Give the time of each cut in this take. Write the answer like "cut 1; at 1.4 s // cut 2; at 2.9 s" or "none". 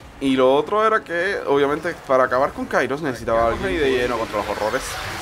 cut 1; at 3.6 s